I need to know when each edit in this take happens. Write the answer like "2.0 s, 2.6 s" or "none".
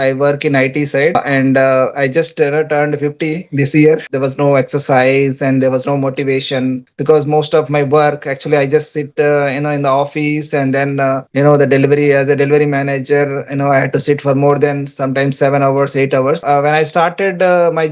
1.1 s, 4.1 s, 6.8 s, 16.4 s